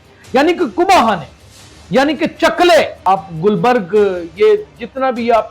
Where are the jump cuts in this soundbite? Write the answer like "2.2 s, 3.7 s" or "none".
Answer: 2.9 s